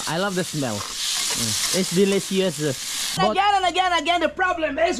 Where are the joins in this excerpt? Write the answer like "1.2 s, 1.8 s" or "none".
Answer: 3.2 s